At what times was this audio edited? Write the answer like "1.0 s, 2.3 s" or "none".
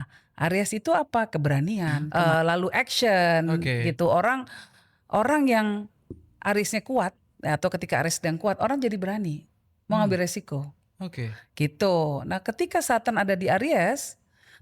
2.0 s